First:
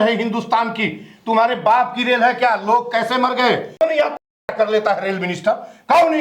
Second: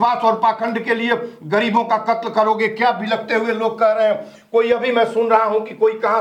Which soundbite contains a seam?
first; 1 cut; at 3.8 s

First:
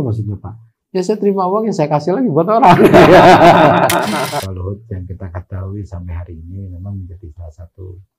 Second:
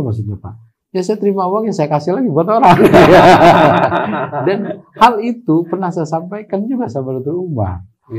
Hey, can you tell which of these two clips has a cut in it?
first; 1 cut; at 4.3 s

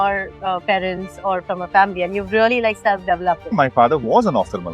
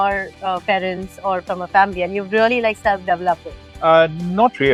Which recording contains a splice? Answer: first; 1 cut; at 3.5 s

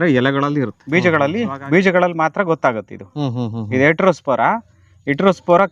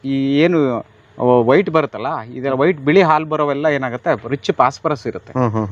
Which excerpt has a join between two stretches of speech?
first; 1 cut; at 0.9 s

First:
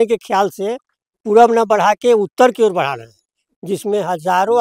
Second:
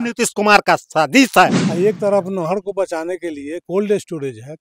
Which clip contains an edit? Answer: second; 1 cut; at 1.6 s

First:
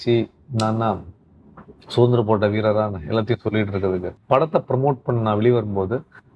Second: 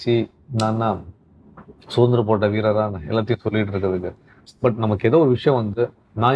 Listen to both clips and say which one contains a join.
first; 1 cut; at 4.1 s

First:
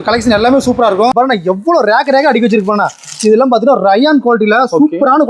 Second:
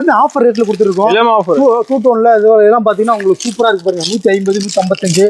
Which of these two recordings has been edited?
first; 1 cut; at 1.1 s

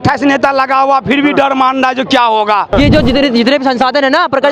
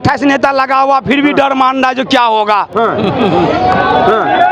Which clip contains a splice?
first; 1 cut; at 2.7 s

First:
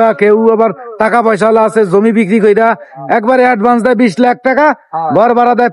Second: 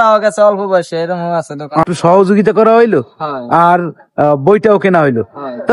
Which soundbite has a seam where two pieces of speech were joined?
second; 1 cut; at 1.8 s

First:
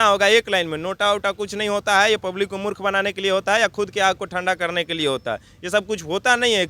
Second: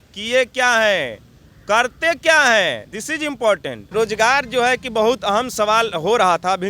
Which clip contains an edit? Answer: second; 1 cut; at 3.8 s

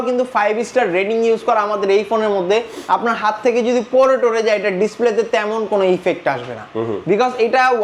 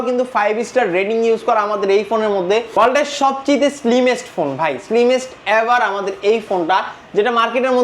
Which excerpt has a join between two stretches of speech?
second; 1 cut; at 2.7 s

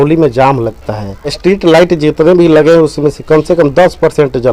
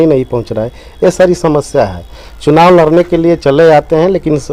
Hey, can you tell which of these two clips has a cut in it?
first; 1 cut; at 1.3 s

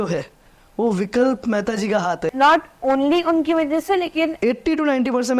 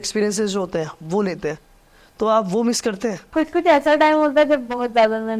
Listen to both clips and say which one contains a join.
first; 2 cuts; at 2.2 s, 4.3 s

